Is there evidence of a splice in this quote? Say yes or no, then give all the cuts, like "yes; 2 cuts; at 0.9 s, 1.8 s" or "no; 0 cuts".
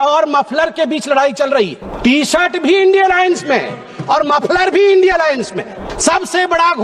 yes; 2 cuts; at 1.8 s, 5.9 s